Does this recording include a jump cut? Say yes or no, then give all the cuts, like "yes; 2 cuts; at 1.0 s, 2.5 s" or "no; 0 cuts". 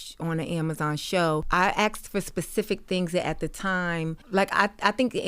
yes; 2 cuts; at 1.5 s, 4.2 s